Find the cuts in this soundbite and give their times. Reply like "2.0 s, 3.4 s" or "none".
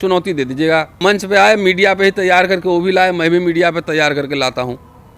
1.0 s